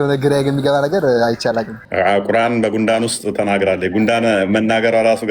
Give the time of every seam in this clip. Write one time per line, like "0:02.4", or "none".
0:01.8